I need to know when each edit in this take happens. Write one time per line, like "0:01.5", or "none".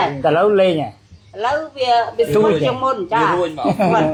none